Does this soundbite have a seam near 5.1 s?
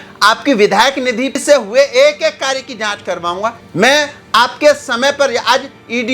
no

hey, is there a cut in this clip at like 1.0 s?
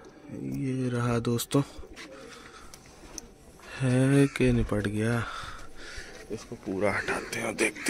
no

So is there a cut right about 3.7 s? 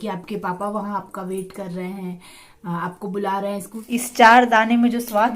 yes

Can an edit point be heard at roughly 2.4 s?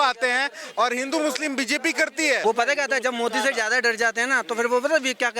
yes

